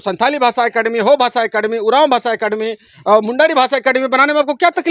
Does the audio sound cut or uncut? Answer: uncut